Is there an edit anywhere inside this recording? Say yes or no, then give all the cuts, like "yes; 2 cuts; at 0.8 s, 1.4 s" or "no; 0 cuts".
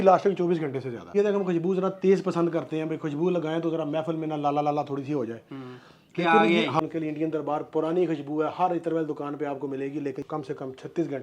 yes; 3 cuts; at 1.1 s, 6.8 s, 10.2 s